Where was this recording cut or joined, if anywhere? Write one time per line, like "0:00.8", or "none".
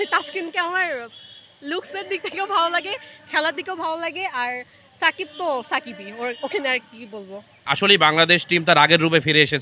0:07.5